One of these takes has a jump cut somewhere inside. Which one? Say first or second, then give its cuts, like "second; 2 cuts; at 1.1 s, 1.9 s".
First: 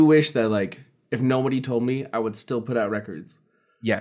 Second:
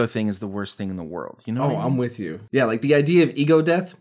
second; 1 cut; at 2.4 s